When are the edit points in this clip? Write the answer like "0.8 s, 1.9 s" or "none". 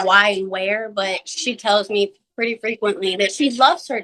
none